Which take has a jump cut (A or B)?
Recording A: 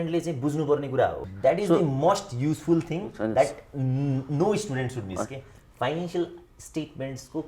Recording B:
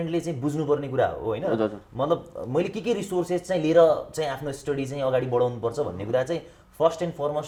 A